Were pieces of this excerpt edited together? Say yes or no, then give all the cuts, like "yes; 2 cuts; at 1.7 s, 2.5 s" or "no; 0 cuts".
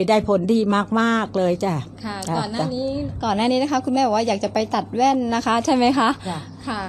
no; 0 cuts